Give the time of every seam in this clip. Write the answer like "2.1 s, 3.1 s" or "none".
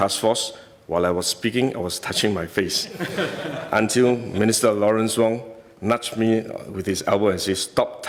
none